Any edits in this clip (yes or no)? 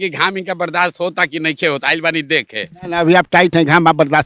no